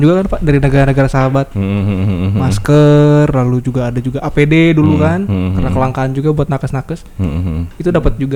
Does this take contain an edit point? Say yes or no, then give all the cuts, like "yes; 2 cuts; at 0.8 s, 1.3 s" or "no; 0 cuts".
no; 0 cuts